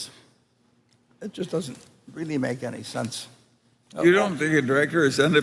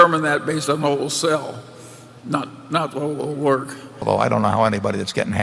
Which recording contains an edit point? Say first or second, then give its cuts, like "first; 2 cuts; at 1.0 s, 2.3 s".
second; 1 cut; at 4.0 s